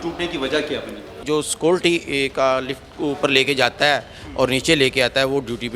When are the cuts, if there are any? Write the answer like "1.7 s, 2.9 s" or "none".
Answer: 1.1 s